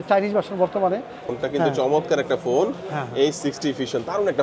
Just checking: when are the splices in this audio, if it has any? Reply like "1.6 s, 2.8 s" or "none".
1.3 s